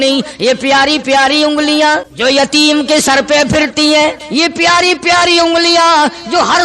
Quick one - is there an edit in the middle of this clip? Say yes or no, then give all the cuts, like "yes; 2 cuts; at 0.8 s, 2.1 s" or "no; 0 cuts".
yes; 2 cuts; at 2.1 s, 4.2 s